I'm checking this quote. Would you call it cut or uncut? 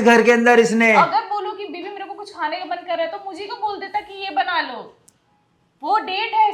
cut